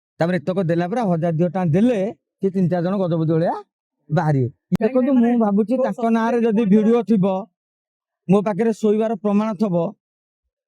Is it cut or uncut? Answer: cut